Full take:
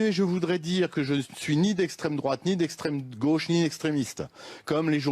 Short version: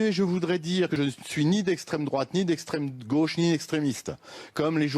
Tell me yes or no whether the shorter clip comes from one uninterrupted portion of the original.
no